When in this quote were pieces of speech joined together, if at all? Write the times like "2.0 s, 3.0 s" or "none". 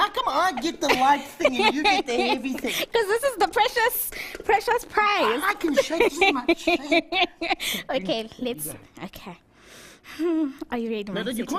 none